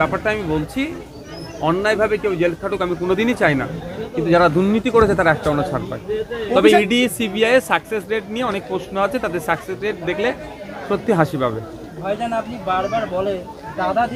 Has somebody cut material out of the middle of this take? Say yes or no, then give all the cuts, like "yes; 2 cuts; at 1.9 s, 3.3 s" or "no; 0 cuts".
no; 0 cuts